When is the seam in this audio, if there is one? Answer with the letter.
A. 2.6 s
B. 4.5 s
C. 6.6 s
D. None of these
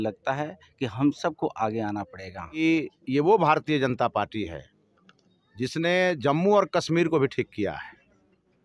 A